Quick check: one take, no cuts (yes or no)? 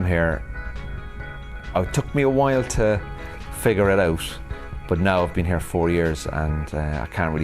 yes